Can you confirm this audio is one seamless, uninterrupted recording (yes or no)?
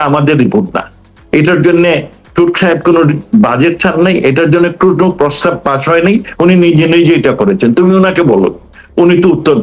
yes